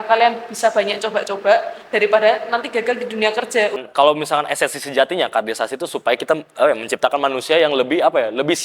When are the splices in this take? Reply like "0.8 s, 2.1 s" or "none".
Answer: 3.8 s

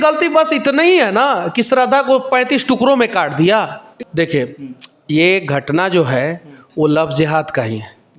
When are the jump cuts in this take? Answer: 3.8 s

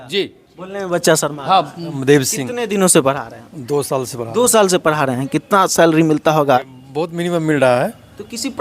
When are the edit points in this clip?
1.8 s, 6.6 s

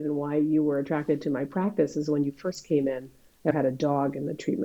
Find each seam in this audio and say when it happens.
3.5 s

